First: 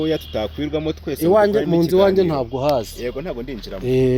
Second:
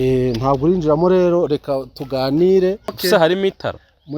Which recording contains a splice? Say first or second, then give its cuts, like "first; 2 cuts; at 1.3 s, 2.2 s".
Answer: second; 1 cut; at 2.9 s